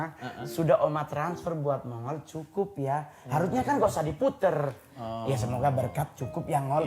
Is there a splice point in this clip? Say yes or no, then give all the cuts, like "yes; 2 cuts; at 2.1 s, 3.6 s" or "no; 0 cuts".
no; 0 cuts